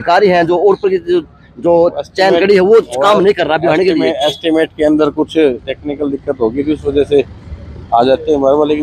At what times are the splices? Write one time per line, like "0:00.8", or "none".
none